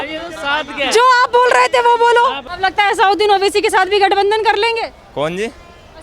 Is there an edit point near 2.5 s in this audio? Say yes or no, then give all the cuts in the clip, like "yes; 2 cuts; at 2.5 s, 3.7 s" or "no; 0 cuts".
yes; 1 cut; at 2.5 s